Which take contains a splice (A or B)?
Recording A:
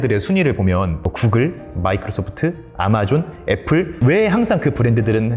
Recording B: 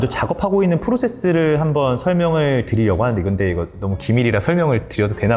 A